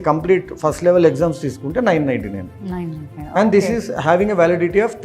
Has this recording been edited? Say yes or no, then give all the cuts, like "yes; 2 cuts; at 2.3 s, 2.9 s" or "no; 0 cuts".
no; 0 cuts